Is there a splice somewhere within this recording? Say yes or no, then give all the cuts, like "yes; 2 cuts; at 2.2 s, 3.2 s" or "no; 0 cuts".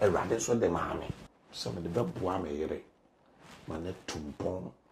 yes; 1 cut; at 1.2 s